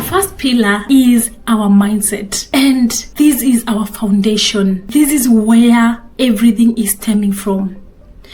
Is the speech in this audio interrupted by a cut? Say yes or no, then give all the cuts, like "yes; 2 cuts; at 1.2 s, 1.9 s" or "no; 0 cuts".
yes; 4 cuts; at 0.8 s, 2.3 s, 3.0 s, 4.8 s